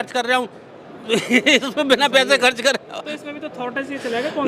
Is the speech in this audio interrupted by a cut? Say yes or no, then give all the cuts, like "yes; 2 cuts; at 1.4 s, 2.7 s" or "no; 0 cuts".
no; 0 cuts